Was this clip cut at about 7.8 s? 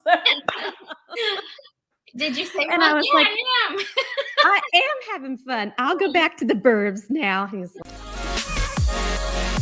yes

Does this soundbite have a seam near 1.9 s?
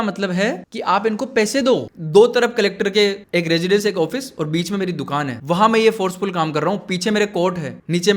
yes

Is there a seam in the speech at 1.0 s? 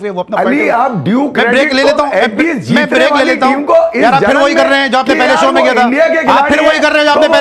no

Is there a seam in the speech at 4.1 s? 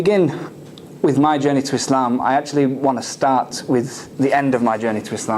no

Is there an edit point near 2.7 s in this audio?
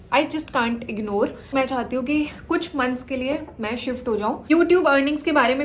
no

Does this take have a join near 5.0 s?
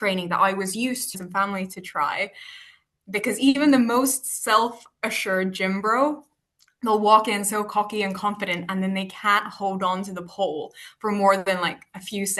no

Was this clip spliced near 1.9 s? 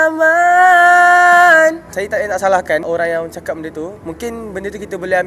yes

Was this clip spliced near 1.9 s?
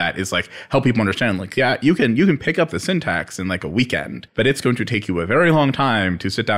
no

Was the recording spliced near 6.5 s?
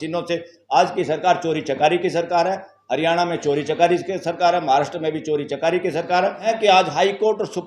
yes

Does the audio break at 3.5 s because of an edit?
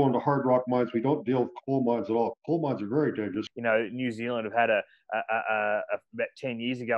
yes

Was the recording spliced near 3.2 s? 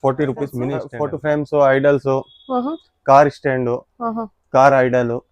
no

